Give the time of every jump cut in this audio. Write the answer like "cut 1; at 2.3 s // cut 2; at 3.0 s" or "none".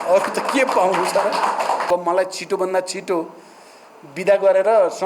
cut 1; at 1.9 s